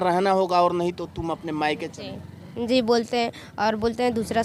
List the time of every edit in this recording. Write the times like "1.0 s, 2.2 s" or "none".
none